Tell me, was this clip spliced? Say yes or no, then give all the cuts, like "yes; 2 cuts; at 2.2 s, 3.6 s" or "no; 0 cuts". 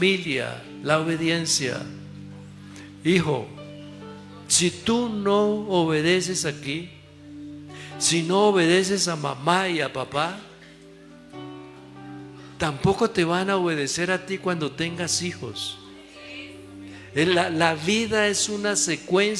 no; 0 cuts